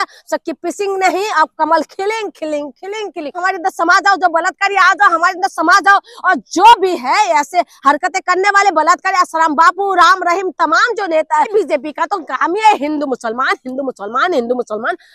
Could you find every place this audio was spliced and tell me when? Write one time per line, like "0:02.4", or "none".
0:03.4
0:11.5